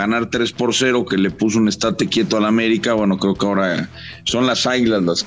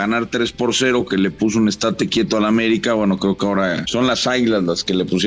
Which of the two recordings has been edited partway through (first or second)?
second